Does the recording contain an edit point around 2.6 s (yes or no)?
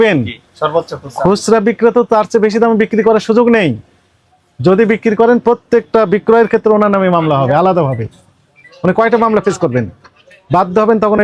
no